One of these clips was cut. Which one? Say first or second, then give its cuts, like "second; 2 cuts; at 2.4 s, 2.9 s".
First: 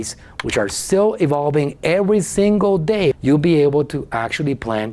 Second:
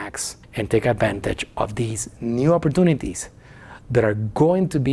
first; 1 cut; at 3.2 s